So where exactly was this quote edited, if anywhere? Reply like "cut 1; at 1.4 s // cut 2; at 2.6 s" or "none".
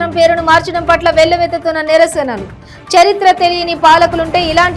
none

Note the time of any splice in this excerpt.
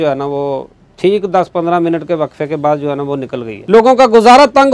cut 1; at 3.5 s

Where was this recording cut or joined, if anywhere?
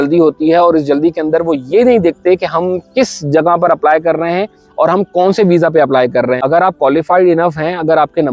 cut 1; at 6.4 s

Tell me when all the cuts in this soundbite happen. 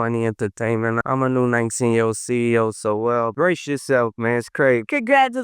cut 1; at 1.0 s

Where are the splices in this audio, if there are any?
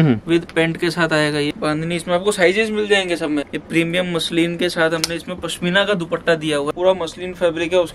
cut 1; at 1.5 s // cut 2; at 3.5 s // cut 3; at 6.7 s

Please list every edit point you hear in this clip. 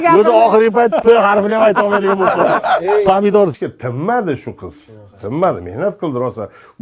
cut 1; at 3.5 s

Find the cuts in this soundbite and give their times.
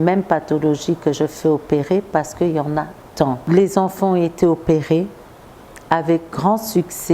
cut 1; at 3.4 s

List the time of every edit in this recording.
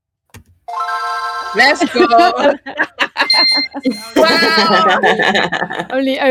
none

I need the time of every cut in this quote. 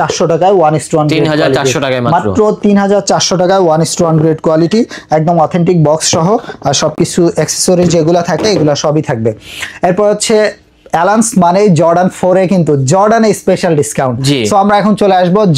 none

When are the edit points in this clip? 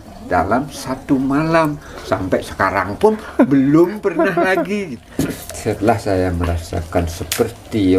cut 1; at 5.0 s

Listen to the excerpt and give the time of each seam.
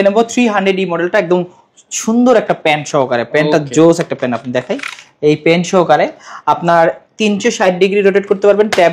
none

